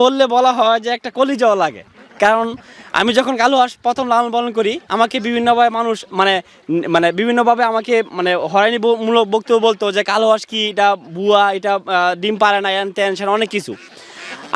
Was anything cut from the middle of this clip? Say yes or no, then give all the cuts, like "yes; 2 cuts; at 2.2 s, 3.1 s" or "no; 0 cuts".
no; 0 cuts